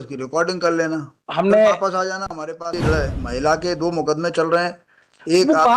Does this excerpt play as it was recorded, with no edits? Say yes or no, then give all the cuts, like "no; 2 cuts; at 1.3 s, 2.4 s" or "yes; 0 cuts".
no; 1 cut; at 2.7 s